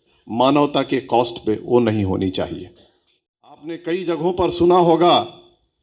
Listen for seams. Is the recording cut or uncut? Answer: cut